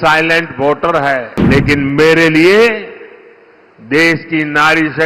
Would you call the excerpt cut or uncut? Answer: cut